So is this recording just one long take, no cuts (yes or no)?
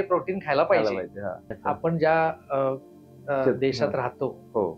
no